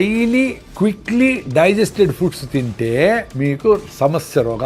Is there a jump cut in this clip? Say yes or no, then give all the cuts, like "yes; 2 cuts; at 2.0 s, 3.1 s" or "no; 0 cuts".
yes; 1 cut; at 3.3 s